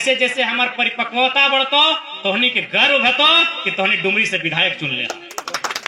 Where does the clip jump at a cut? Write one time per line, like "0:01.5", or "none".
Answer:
none